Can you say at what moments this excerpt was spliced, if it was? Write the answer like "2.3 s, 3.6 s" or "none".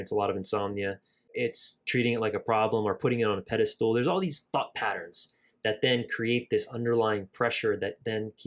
1.3 s